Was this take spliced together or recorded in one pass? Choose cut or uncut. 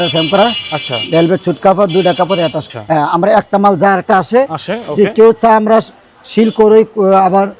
cut